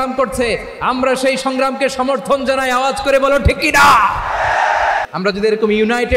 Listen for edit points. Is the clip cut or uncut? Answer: cut